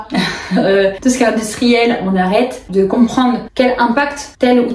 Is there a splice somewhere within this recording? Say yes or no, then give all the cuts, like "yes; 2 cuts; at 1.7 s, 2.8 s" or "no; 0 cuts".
yes; 1 cut; at 2.6 s